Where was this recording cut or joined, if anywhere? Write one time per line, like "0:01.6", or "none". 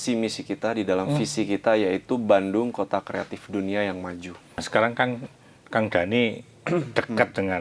0:04.7